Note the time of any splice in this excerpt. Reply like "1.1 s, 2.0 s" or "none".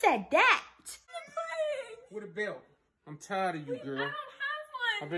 1.0 s

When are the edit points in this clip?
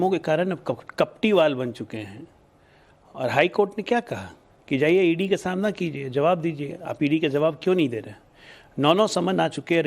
none

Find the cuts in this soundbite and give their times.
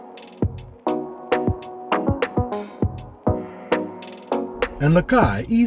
4.8 s

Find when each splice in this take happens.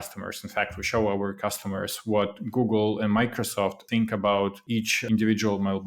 3.8 s, 4.9 s

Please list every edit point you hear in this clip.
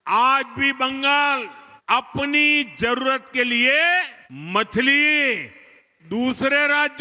none

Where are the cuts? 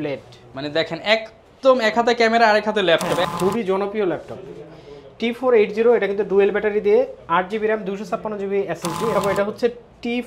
3.2 s, 9.1 s

